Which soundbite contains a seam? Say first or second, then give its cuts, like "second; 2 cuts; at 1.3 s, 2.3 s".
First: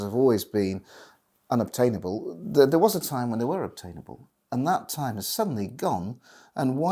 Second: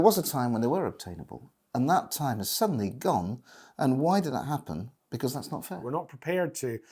second; 1 cut; at 5.8 s